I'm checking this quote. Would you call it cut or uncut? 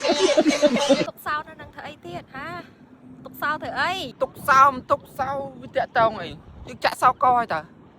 cut